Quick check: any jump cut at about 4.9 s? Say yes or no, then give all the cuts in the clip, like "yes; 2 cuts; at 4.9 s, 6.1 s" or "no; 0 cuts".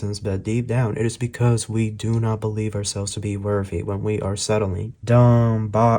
yes; 1 cut; at 4.9 s